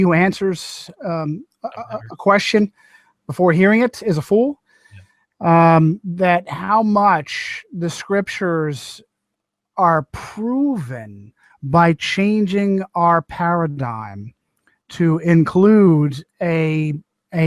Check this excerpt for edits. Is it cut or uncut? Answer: uncut